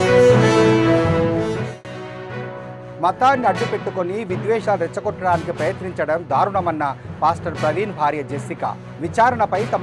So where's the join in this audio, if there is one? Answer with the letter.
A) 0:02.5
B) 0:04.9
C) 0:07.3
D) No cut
A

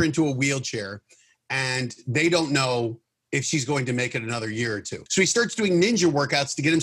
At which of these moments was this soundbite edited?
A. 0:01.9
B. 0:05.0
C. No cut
B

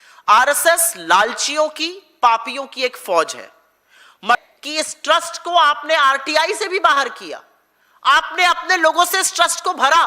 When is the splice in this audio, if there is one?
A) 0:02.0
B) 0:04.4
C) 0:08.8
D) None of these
B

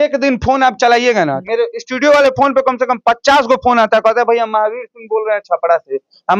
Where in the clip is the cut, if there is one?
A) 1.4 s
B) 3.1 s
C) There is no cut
A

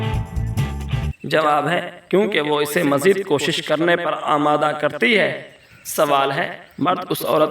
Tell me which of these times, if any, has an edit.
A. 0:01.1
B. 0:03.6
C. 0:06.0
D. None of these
A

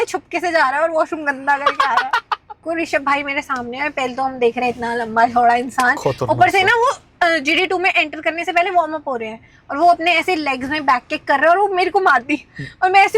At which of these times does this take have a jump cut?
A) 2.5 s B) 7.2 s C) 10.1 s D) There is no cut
A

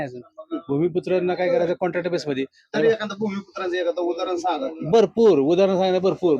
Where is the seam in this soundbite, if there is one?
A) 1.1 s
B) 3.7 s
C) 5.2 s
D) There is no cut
D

